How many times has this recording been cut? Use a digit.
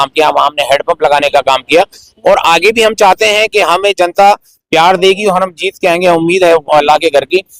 0